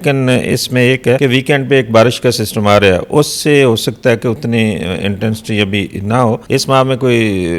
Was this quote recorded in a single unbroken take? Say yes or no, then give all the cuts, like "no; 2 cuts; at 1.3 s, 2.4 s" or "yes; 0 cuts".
no; 2 cuts; at 1.2 s, 6.4 s